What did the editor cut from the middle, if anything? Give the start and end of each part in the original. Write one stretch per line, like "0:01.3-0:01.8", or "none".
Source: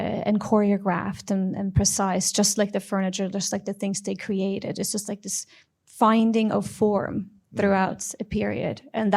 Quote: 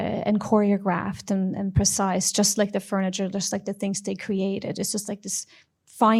none